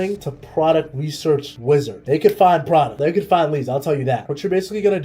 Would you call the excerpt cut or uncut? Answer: cut